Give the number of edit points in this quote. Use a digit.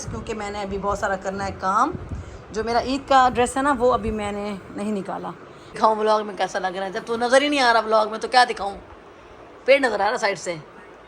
1